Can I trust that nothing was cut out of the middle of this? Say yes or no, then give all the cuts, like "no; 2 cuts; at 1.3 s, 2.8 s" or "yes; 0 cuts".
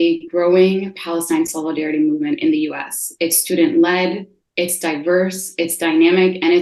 yes; 0 cuts